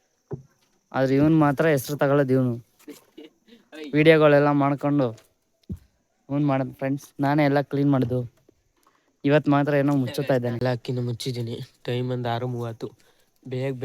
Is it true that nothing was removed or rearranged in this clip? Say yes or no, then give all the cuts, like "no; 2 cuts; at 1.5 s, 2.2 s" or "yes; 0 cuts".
no; 1 cut; at 10.6 s